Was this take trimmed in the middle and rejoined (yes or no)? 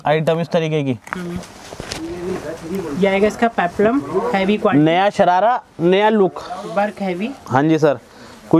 no